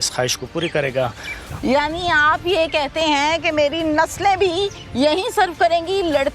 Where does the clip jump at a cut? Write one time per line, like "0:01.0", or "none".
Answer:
0:01.5